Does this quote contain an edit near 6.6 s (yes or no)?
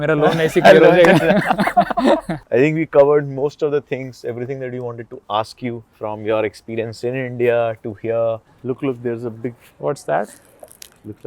no